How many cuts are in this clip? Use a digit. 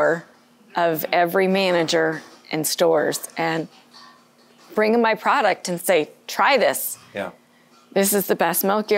0